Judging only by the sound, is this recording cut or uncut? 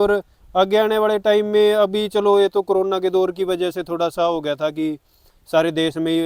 uncut